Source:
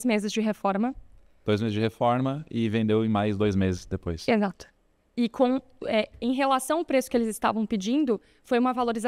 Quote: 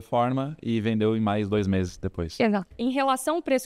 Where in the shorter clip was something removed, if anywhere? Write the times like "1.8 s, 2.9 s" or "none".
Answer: 2.7 s